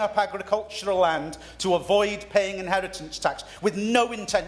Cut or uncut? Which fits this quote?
uncut